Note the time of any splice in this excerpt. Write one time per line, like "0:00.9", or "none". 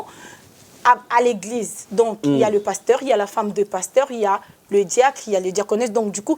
none